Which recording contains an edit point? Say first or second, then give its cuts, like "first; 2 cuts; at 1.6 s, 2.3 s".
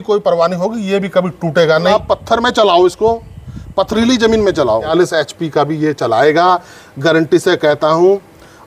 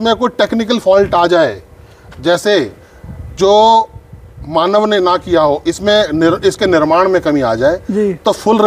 first; 2 cuts; at 1.9 s, 4.9 s